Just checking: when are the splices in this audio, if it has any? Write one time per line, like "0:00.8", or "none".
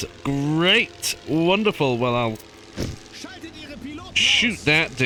none